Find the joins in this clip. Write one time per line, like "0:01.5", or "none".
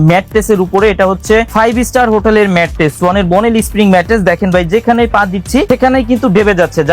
0:01.5
0:05.7